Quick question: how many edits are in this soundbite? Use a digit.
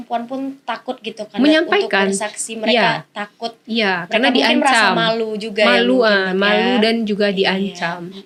0